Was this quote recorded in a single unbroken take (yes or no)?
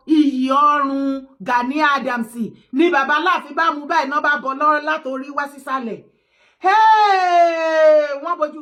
yes